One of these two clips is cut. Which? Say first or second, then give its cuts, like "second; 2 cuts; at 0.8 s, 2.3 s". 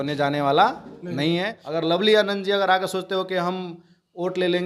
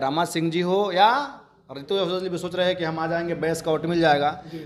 first; 1 cut; at 1.6 s